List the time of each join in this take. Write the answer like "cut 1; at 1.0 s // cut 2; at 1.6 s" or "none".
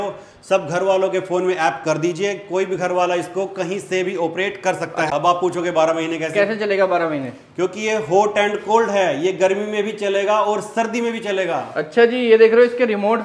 cut 1; at 5.1 s